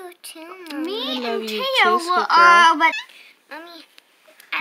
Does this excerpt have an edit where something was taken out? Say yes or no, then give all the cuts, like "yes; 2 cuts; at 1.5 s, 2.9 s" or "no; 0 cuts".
yes; 1 cut; at 3.0 s